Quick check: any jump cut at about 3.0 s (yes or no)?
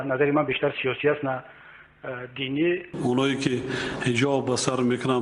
yes